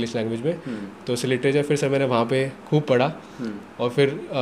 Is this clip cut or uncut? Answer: uncut